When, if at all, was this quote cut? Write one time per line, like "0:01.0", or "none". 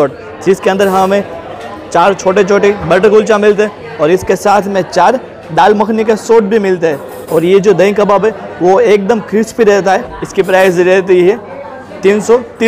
0:07.1
0:10.1